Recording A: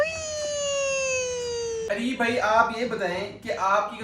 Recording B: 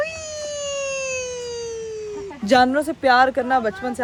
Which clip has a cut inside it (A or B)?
A